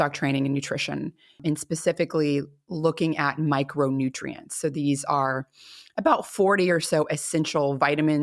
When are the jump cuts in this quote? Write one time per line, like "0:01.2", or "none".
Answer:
0:01.4